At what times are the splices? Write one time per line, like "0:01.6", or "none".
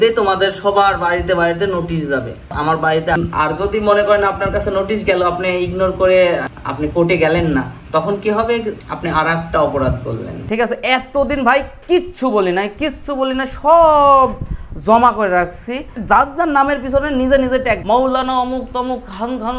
0:03.2
0:10.3